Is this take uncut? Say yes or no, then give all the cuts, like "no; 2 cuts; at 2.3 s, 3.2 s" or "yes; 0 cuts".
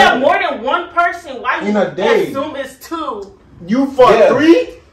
yes; 0 cuts